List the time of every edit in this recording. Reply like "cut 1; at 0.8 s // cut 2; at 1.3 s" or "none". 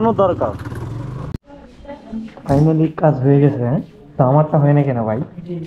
cut 1; at 1.3 s